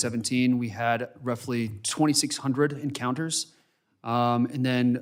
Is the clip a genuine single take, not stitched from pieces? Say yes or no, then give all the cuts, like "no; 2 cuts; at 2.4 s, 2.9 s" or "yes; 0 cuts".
yes; 0 cuts